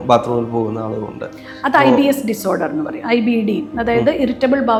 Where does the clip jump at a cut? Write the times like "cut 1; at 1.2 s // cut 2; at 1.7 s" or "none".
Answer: none